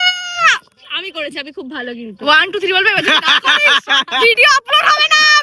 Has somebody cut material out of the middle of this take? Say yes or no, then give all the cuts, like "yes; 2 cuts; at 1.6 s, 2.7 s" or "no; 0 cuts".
no; 0 cuts